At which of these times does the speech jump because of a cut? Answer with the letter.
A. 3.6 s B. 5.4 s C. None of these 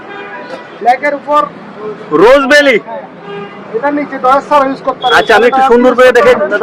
C